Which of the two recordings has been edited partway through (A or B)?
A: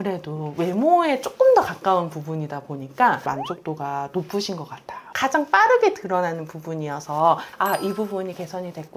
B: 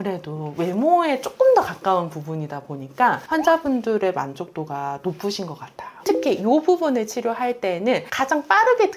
A